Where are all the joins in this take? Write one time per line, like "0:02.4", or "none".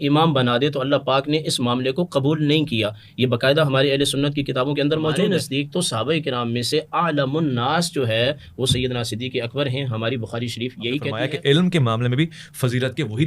0:05.3
0:11.1